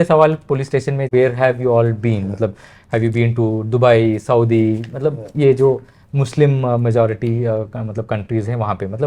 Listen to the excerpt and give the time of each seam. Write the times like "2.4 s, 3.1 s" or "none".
1.1 s